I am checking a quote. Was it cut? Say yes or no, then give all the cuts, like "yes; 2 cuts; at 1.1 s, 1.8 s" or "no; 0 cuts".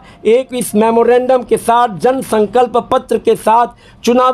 no; 0 cuts